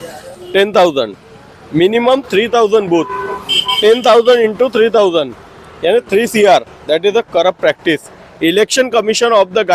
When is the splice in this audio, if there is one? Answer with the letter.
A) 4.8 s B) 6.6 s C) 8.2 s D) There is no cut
D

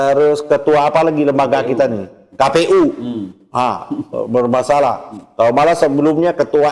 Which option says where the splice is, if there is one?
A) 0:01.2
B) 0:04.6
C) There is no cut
C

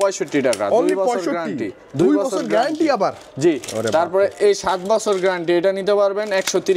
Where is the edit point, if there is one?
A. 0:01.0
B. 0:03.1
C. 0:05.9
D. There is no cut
D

